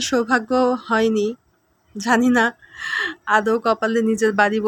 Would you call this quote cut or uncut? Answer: uncut